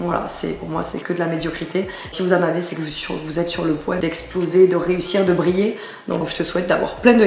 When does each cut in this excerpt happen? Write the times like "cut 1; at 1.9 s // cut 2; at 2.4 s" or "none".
cut 1; at 2.1 s // cut 2; at 4.0 s // cut 3; at 6.3 s